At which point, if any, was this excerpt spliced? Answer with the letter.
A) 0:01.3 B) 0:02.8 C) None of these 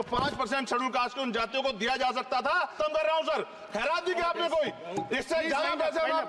B